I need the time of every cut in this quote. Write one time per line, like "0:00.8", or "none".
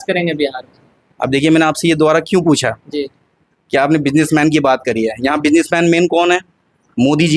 none